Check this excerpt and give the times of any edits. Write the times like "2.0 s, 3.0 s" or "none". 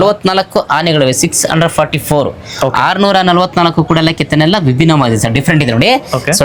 none